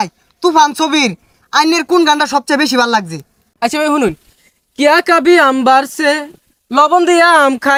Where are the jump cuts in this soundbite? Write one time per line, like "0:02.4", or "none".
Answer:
none